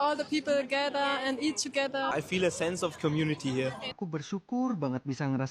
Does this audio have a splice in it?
yes; 2 cuts; at 2.1 s, 3.9 s

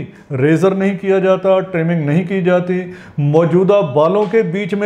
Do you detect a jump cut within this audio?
no; 0 cuts

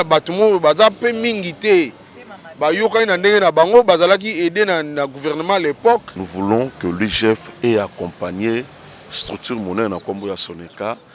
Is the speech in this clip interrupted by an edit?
yes; 1 cut; at 6.2 s

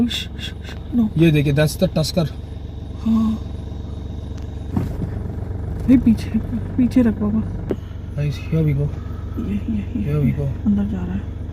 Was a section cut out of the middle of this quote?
yes; 2 cuts; at 4.7 s, 7.6 s

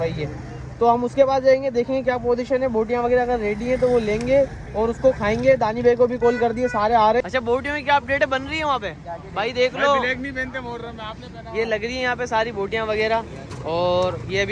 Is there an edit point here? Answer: yes; 1 cut; at 7.2 s

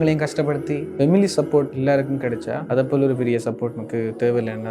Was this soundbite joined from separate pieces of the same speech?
yes; 3 cuts; at 0.9 s, 2.3 s, 3.8 s

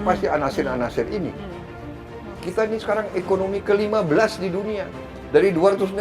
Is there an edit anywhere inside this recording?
yes; 1 cut; at 1.9 s

